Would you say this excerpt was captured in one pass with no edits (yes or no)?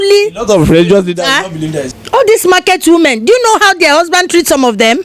no